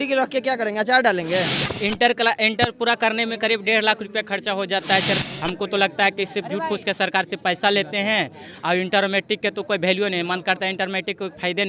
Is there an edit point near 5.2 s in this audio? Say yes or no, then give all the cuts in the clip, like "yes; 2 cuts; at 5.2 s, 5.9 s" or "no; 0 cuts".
yes; 2 cuts; at 1.6 s, 5.2 s